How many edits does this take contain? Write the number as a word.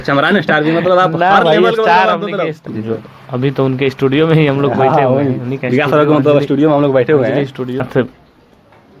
one